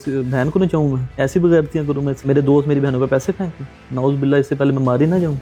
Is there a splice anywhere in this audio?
no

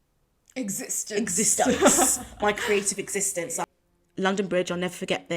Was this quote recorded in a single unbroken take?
no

